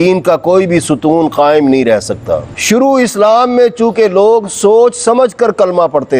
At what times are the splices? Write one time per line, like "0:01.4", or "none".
0:02.5

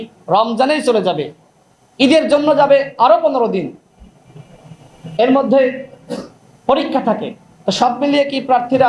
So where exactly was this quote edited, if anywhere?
none

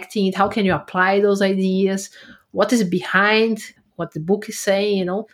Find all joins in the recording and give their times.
0:03.7

